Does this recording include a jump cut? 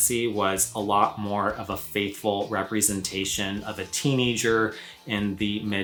no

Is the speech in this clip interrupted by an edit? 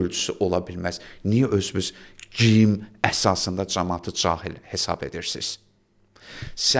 no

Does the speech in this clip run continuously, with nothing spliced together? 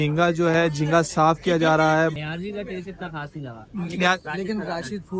no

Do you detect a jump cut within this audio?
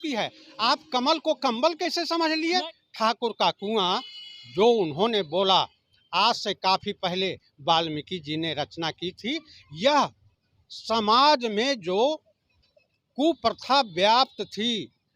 yes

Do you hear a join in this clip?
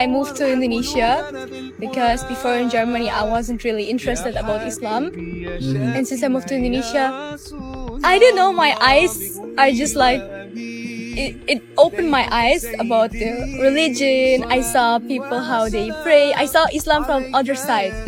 no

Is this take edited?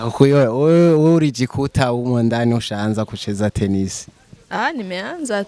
no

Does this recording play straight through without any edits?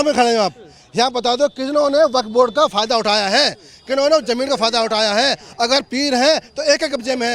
yes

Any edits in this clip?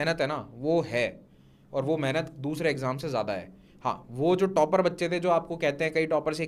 no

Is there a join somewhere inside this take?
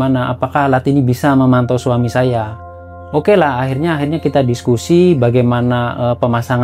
no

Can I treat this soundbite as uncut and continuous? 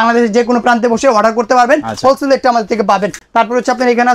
yes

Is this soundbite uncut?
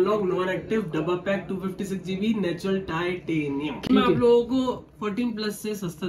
no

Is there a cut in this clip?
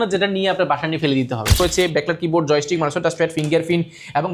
yes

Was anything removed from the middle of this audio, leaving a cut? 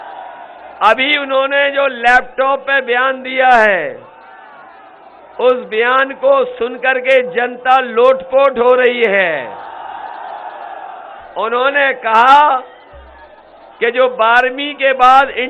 no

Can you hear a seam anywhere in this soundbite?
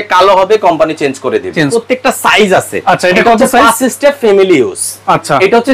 yes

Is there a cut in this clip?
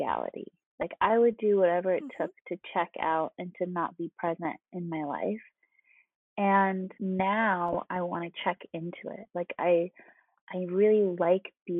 yes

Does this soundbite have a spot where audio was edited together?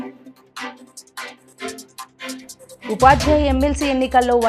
no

